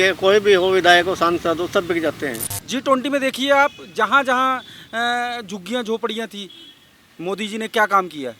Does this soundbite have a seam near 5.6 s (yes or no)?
no